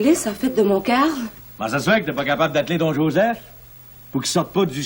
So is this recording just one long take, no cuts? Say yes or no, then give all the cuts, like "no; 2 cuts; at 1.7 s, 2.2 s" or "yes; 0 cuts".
no; 1 cut; at 1.4 s